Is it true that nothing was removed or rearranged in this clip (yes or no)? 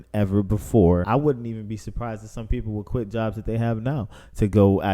no